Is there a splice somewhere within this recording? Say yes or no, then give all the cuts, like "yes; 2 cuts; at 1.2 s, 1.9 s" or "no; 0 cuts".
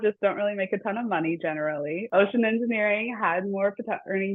yes; 1 cut; at 2.0 s